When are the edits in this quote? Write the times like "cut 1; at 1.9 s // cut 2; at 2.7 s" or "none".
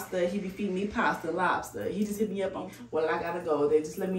cut 1; at 2.6 s